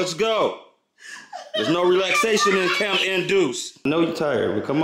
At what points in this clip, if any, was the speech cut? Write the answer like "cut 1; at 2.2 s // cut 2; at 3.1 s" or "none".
cut 1; at 3.8 s